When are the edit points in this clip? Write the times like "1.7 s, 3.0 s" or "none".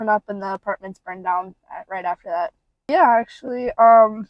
2.7 s